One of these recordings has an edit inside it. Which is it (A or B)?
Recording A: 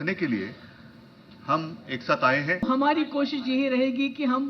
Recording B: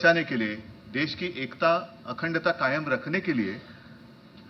A